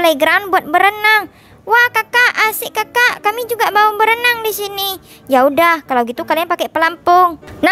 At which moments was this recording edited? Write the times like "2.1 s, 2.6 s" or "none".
none